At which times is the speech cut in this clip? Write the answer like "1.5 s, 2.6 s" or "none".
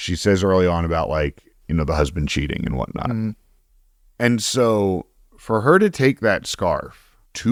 none